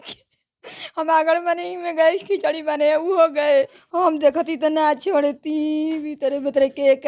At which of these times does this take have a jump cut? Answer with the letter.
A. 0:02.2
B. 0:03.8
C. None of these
B